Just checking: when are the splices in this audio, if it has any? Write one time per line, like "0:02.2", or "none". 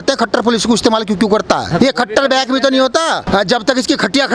0:01.7
0:03.2